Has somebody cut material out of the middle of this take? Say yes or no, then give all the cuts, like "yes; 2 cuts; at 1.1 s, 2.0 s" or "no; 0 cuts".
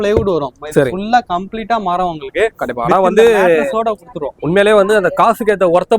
no; 0 cuts